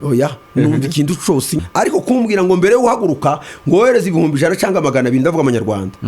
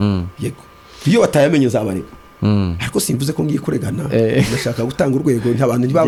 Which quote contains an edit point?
first; 1 cut; at 1.7 s

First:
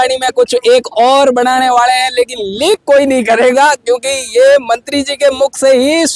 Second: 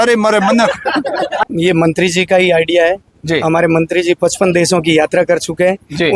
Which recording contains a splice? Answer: second; 1 cut; at 1.4 s

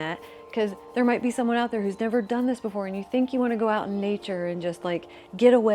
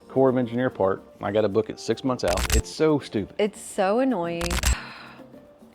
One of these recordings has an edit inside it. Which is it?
second; 2 cuts; at 2.6 s, 4.6 s

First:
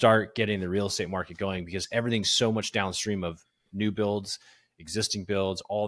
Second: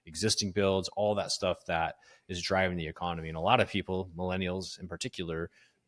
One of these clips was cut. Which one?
first; 1 cut; at 1.8 s

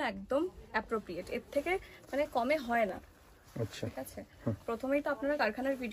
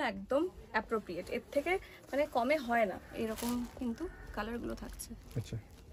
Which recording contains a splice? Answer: second; 1 cut; at 2.9 s

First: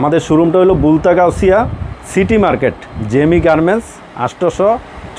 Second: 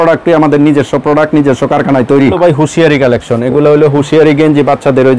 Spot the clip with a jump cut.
second; 1 cut; at 2.4 s

